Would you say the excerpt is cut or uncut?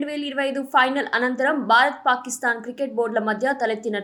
uncut